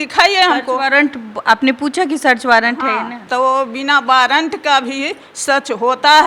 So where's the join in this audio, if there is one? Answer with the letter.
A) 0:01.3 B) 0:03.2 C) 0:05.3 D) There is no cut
B